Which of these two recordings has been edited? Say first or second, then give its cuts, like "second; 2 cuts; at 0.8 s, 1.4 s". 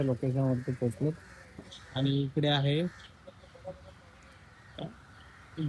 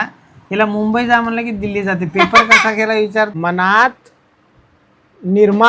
second; 1 cut; at 3.3 s